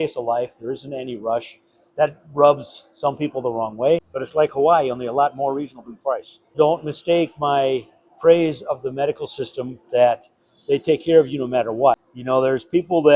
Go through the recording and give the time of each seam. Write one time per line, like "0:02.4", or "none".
0:04.1
0:06.5
0:12.1